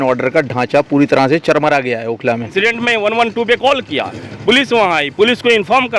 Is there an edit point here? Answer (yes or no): yes